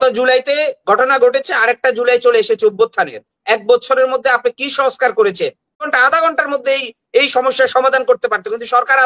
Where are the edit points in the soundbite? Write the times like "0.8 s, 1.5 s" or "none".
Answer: 5.9 s